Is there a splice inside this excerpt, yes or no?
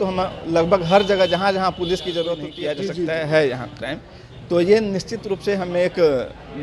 yes